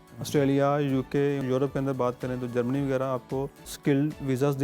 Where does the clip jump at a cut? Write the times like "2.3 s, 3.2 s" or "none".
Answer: 1.4 s, 3.6 s